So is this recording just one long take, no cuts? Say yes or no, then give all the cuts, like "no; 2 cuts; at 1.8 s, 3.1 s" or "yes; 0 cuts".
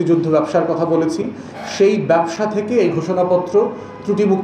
yes; 0 cuts